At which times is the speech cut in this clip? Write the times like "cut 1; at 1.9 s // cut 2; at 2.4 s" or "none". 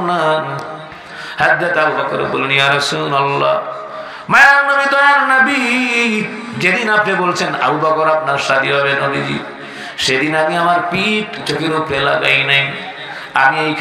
cut 1; at 11.4 s